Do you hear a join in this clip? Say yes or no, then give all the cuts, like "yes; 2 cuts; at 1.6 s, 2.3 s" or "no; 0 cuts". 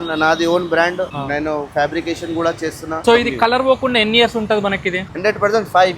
yes; 3 cuts; at 1.2 s, 3.0 s, 5.1 s